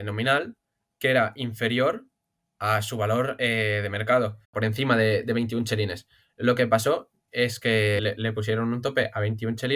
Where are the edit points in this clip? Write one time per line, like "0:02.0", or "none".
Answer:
0:04.5
0:08.0